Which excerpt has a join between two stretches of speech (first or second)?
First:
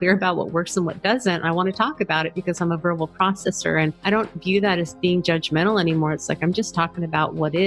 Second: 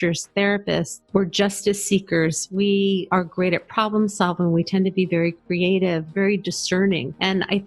second